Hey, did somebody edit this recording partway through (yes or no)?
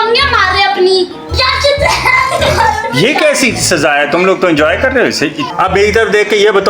yes